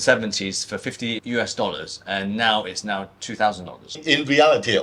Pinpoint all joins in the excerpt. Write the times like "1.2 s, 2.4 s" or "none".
1.2 s, 3.9 s